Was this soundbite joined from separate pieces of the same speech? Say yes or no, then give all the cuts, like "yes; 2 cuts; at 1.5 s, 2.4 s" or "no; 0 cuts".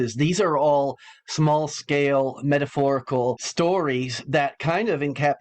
yes; 1 cut; at 3.4 s